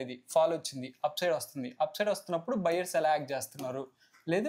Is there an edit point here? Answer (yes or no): no